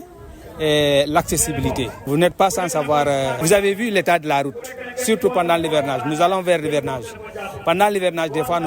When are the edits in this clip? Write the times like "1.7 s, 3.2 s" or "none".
2.0 s, 3.4 s